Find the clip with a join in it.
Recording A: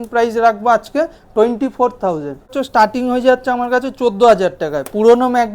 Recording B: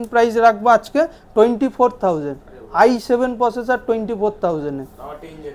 A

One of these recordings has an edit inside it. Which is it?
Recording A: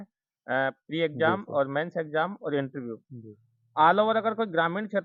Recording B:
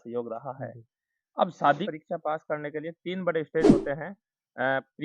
B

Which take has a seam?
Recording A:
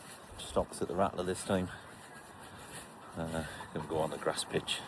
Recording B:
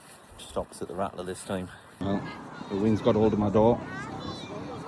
B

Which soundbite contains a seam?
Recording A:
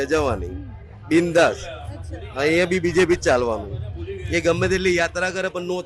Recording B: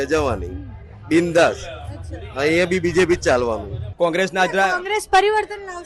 B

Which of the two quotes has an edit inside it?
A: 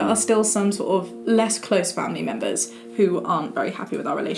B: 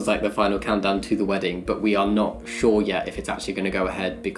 A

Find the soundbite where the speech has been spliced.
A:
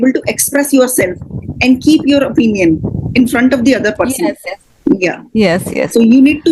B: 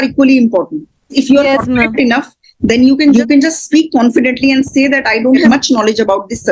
B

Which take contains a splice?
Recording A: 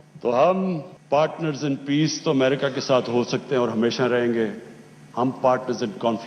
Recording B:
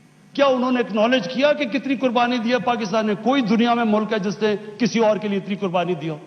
A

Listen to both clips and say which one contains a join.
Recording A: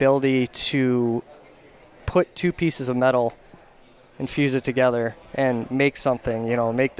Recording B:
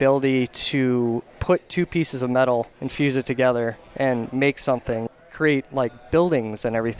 B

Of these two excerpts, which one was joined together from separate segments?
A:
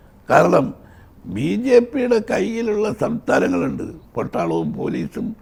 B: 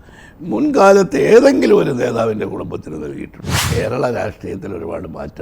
B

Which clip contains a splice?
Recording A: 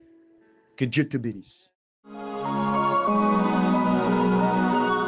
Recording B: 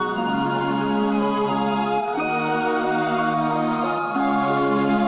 A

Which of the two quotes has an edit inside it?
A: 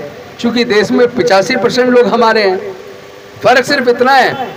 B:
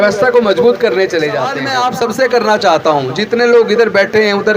B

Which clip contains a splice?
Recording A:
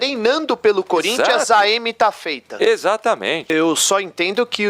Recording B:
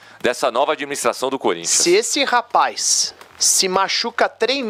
A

